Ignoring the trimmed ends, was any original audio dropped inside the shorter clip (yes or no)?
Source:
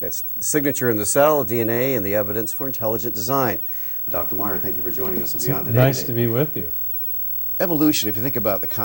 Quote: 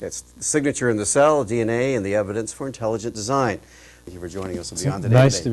yes